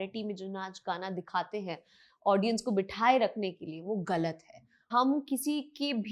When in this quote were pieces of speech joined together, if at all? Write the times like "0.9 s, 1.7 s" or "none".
4.9 s